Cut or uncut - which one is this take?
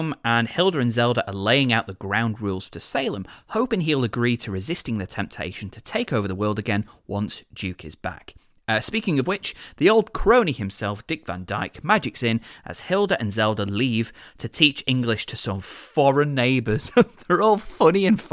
uncut